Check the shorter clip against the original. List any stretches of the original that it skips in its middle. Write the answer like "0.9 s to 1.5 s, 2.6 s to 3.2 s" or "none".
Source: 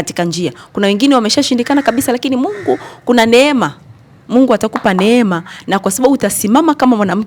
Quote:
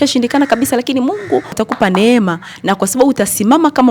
2.9 s to 4.6 s